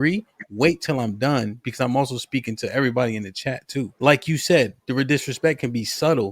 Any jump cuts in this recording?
yes; 1 cut; at 4.0 s

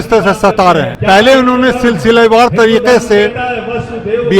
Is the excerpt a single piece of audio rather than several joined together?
no; 1 cut; at 0.9 s

